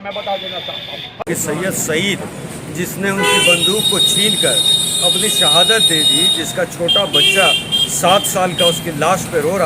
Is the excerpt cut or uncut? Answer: cut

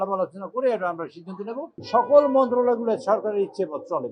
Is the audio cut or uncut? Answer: cut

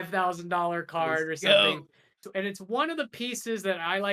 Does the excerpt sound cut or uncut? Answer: cut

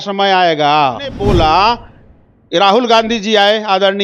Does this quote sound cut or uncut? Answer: cut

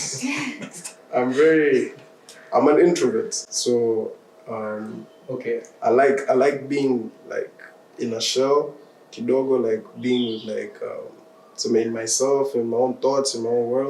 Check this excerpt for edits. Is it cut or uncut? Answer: uncut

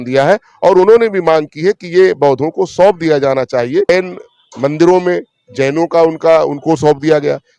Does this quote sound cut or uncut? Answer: cut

